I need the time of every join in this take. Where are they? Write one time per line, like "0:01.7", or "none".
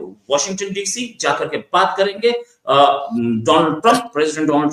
none